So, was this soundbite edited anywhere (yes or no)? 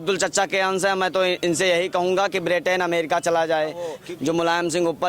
yes